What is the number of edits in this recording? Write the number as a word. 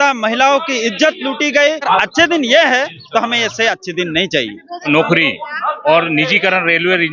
two